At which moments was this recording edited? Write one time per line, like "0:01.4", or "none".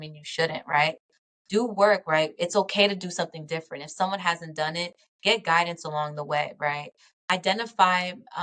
0:07.2